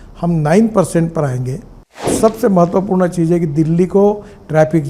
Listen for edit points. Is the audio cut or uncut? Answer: cut